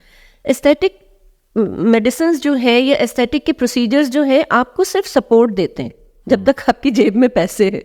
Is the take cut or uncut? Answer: uncut